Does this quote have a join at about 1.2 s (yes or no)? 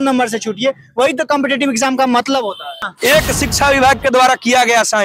no